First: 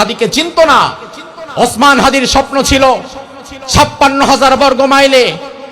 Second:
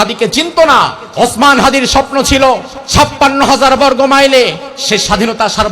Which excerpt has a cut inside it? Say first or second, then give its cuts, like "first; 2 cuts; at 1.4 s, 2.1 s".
second; 3 cuts; at 1.0 s, 2.8 s, 4.7 s